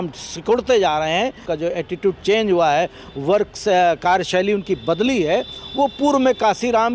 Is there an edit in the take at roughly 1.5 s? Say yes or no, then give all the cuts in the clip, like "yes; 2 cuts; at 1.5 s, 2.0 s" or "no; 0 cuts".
yes; 1 cut; at 1.5 s